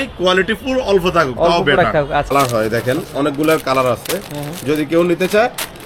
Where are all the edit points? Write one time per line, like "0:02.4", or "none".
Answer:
0:02.3